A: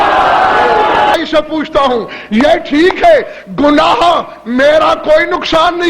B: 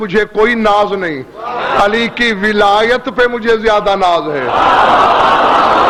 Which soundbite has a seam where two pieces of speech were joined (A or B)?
A